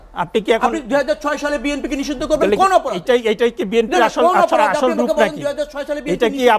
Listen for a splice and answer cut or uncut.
uncut